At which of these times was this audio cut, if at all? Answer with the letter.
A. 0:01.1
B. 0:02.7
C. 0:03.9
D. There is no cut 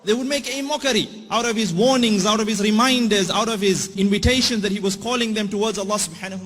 C